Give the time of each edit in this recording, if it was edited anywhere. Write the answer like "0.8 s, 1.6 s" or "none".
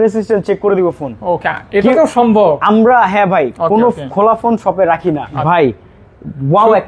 5.3 s